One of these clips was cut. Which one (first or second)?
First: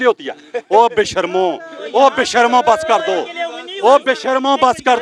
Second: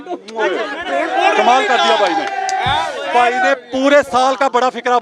second